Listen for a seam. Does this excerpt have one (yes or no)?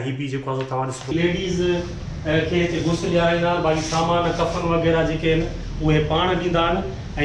yes